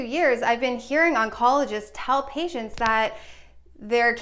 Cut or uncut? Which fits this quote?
uncut